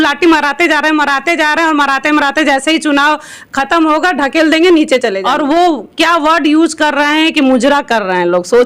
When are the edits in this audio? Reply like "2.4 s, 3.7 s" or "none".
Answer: 5.2 s

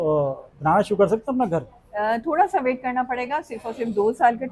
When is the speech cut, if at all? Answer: none

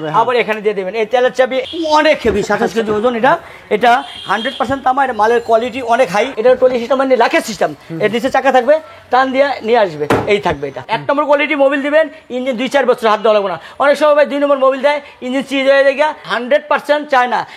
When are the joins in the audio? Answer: 1.6 s, 6.3 s, 10.9 s, 16.2 s

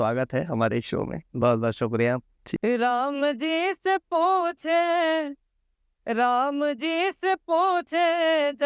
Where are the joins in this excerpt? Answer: 2.4 s

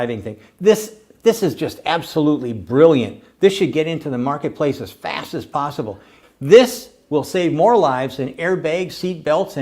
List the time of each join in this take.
6.2 s

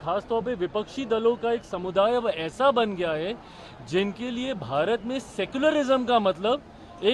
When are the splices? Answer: none

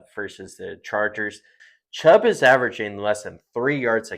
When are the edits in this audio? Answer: 1.6 s

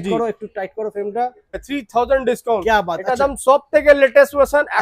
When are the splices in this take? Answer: 1.7 s

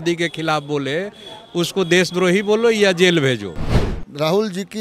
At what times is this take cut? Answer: 3.8 s

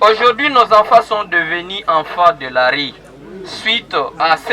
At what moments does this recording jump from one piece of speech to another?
none

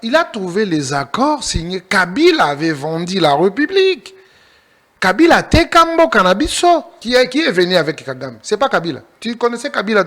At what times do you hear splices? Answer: 7.0 s

